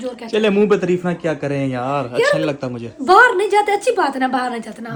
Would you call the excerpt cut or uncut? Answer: uncut